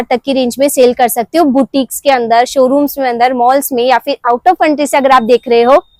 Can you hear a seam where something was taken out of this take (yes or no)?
no